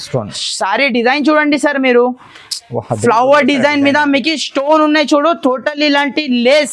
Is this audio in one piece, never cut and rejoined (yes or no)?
yes